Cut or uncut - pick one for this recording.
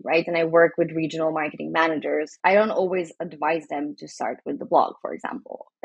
cut